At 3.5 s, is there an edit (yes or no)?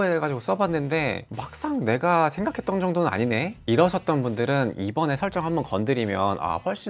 no